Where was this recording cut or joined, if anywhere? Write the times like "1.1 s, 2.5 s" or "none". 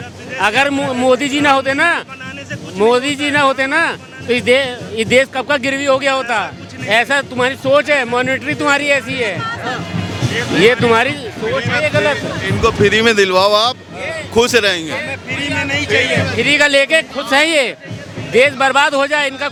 none